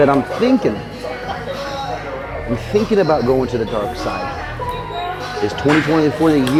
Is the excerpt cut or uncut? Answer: uncut